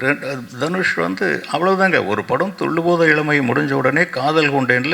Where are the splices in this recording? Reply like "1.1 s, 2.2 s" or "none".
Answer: none